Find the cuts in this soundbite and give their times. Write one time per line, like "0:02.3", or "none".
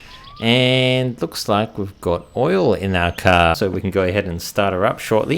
0:03.5

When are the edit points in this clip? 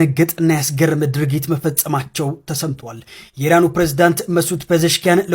none

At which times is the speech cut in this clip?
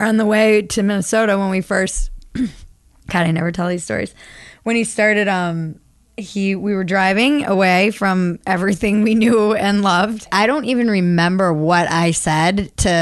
0:10.3

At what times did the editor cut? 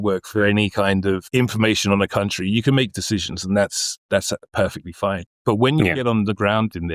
none

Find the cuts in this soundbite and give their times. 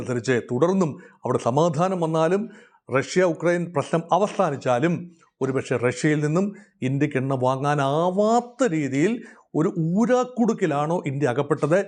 none

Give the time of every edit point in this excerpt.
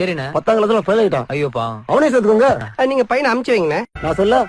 0:01.2

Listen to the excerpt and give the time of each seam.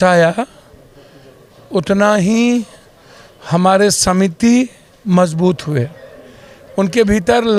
none

